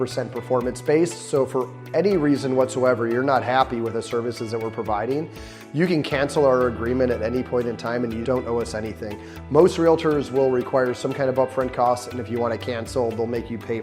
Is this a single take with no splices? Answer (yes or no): yes